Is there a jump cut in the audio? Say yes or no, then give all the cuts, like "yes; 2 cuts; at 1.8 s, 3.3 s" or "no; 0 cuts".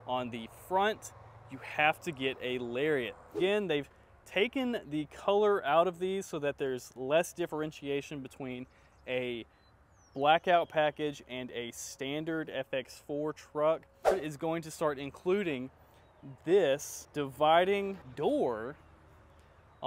yes; 4 cuts; at 3.3 s, 14.1 s, 17.0 s, 18.0 s